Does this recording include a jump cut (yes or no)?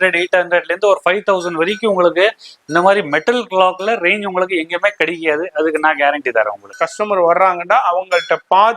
yes